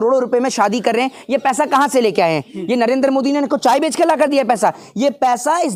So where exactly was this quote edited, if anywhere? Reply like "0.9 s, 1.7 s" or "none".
none